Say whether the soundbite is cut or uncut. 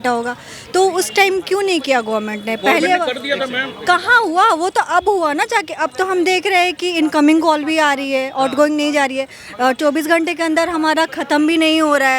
uncut